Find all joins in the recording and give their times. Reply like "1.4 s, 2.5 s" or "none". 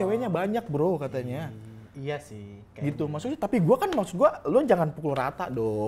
none